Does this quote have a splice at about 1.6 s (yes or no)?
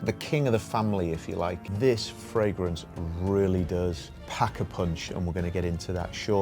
yes